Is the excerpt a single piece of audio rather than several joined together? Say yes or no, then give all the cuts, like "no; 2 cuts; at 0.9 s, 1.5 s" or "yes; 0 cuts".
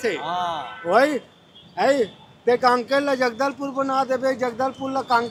yes; 0 cuts